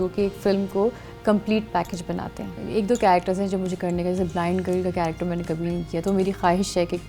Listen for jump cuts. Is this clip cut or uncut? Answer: cut